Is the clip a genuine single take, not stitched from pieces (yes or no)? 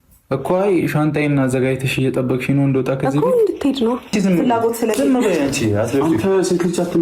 no